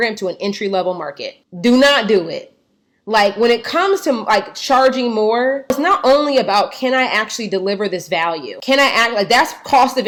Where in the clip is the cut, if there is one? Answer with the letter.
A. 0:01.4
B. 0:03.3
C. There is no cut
C